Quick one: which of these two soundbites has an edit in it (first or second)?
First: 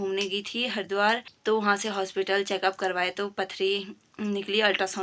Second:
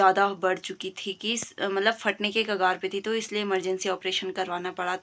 first